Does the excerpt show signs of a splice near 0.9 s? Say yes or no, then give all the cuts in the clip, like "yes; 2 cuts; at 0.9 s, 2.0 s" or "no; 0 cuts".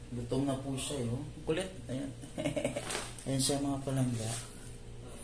no; 1 cut; at 2.8 s